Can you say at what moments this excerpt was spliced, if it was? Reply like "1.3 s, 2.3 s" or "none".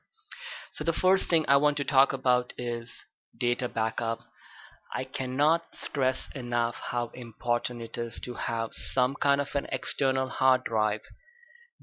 10.8 s